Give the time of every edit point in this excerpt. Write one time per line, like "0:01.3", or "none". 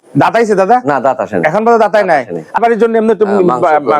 0:02.6